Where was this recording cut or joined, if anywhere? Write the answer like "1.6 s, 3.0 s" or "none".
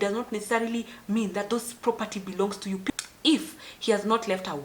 2.9 s